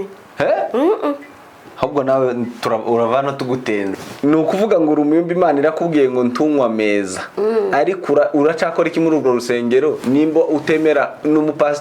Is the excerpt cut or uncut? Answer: cut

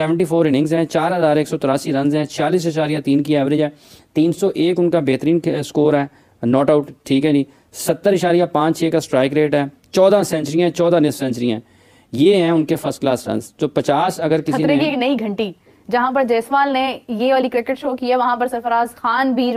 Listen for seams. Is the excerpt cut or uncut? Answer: uncut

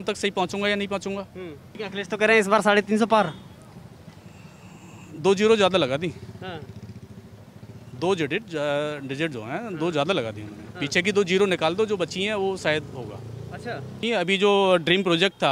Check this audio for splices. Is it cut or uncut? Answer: cut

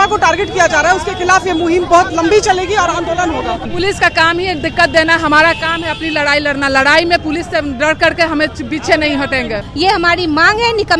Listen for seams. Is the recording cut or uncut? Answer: cut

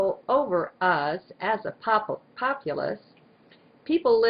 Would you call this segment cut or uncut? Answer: uncut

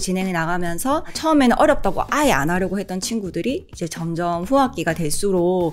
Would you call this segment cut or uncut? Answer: cut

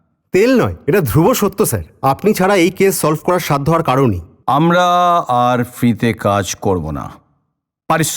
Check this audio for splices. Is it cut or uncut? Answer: cut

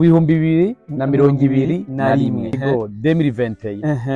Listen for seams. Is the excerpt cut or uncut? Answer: cut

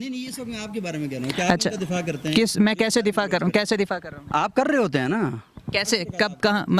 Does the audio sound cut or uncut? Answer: uncut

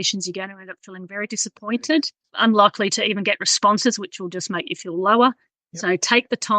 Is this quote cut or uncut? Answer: cut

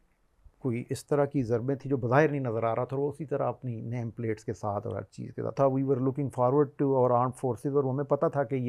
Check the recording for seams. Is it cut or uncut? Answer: cut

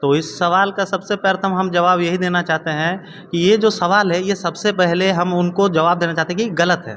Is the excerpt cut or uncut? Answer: uncut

